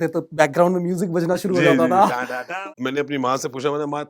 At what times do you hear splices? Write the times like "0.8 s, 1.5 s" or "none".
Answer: 2.5 s